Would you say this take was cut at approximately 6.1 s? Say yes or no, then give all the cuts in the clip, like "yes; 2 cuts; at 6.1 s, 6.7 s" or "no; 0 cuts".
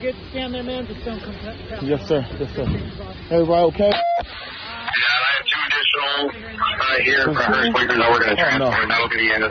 yes; 1 cut; at 6.1 s